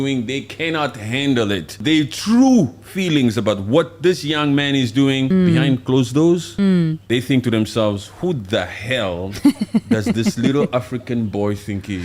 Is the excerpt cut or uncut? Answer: cut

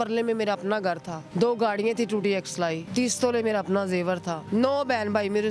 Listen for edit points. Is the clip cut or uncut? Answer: cut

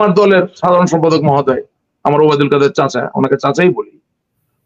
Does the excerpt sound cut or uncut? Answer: uncut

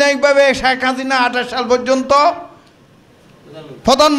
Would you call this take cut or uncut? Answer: uncut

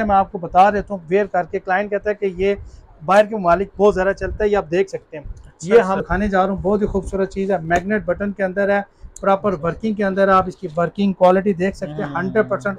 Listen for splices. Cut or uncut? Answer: cut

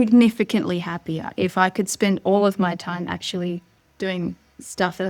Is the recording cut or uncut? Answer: cut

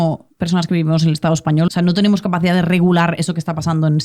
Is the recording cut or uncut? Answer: cut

